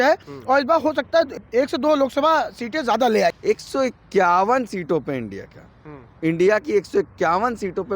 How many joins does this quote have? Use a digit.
2